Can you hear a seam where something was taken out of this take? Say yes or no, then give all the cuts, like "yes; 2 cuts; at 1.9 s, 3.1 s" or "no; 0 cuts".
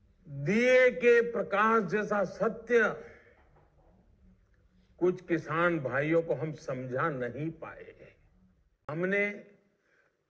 yes; 1 cut; at 8.9 s